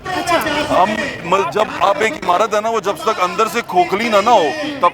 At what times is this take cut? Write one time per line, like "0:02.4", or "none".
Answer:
none